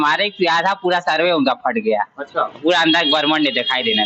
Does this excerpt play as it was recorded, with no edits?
yes; 0 cuts

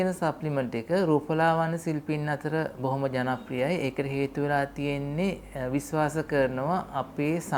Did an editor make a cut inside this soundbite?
no; 0 cuts

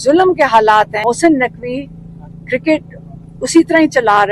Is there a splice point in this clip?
no; 0 cuts

